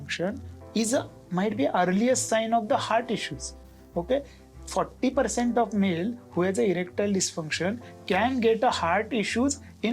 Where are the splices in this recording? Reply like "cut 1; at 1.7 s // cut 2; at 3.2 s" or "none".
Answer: none